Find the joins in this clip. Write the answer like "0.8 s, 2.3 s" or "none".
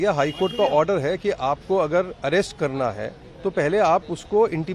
none